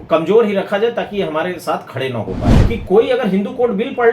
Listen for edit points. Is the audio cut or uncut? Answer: cut